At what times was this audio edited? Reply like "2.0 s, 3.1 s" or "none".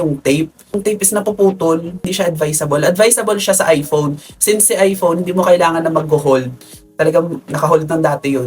0.8 s, 2.1 s